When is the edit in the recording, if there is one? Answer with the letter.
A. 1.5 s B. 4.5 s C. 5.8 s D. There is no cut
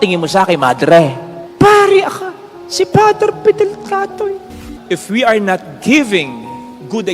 B